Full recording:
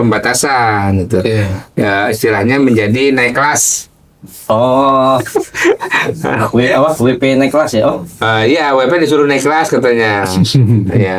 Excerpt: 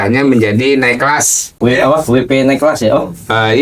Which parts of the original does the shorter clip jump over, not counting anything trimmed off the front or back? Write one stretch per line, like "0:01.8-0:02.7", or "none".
0:03.9-0:06.5